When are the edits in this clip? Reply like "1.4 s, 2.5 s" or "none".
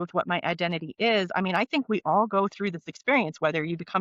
none